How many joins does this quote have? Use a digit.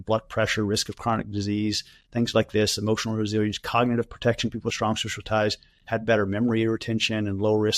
1